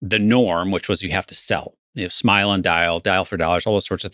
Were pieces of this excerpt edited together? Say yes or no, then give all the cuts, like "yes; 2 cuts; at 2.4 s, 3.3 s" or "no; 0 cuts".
yes; 1 cut; at 1.7 s